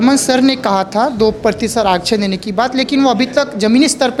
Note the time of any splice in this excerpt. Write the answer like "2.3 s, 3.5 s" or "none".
none